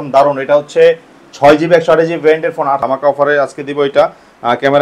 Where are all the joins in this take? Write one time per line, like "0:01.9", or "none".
0:02.8